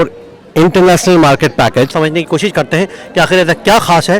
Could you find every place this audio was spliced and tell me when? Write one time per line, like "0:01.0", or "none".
0:01.9

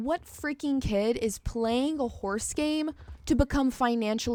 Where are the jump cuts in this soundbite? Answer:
none

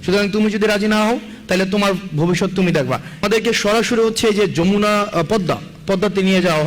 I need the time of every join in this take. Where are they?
0:03.2

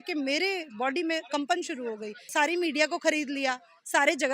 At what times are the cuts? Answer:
0:02.2

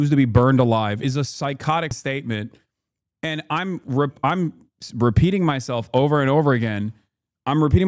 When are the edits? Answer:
0:01.9

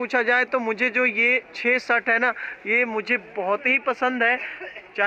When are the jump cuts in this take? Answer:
none

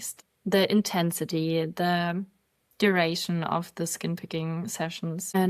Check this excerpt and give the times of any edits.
none

